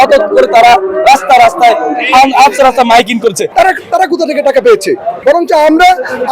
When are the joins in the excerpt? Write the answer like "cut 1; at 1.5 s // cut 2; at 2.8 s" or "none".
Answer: cut 1; at 3.4 s // cut 2; at 5.1 s